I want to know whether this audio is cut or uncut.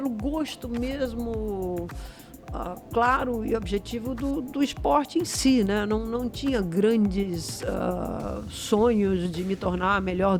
uncut